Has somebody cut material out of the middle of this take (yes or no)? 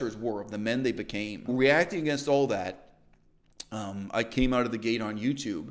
yes